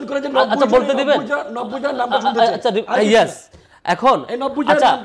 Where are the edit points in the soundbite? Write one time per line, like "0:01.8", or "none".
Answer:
none